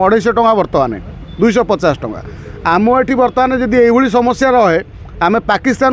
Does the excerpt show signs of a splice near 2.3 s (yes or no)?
no